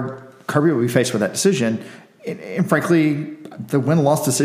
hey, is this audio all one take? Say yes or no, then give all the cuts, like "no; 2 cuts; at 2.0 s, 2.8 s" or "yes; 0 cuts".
yes; 0 cuts